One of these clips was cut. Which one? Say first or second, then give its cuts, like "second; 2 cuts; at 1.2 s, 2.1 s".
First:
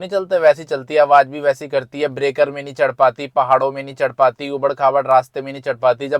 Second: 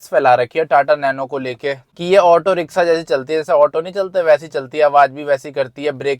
second; 1 cut; at 1.9 s